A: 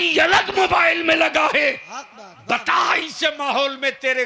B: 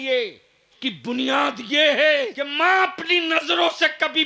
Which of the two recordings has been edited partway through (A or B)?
B